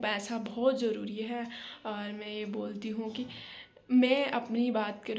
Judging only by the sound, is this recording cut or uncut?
uncut